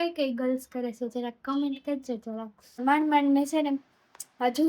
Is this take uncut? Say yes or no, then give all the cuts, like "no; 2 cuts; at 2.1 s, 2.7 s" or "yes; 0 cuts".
no; 1 cut; at 2.8 s